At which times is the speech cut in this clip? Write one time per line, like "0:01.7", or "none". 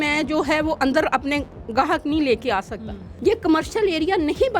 0:03.0